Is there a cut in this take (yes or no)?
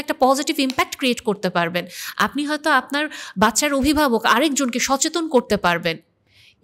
no